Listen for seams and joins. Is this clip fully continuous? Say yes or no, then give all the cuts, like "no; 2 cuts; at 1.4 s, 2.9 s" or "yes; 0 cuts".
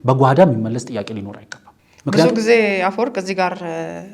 yes; 0 cuts